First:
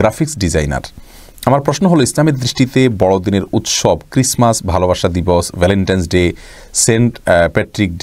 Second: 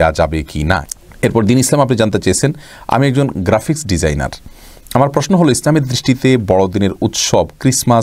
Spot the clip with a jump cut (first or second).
second